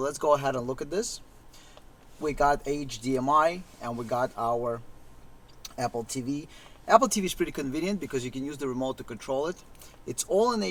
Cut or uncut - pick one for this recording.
uncut